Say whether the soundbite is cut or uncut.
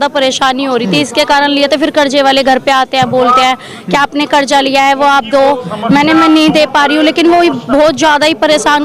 uncut